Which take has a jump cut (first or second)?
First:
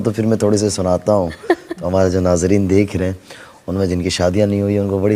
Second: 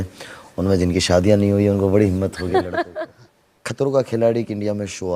second